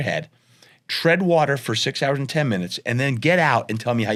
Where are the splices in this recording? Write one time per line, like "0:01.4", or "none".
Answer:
none